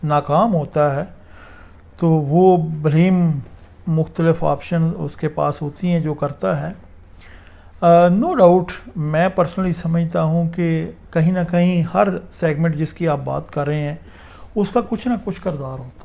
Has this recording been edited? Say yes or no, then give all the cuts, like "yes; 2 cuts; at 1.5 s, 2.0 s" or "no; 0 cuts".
no; 0 cuts